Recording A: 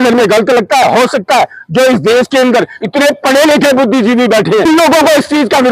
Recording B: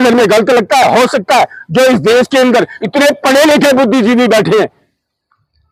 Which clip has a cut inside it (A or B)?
A